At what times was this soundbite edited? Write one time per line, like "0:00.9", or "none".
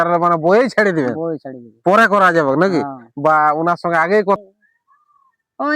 0:04.4

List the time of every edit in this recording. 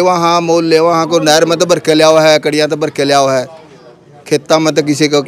none

